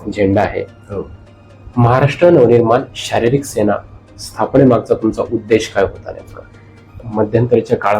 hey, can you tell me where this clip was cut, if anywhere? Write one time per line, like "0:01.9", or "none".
0:07.0